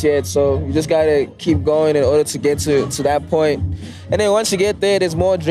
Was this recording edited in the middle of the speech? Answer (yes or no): no